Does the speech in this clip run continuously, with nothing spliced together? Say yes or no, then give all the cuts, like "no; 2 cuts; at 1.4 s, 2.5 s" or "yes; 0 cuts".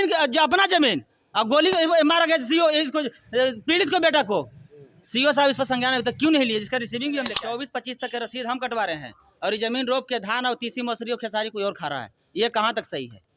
no; 1 cut; at 7.4 s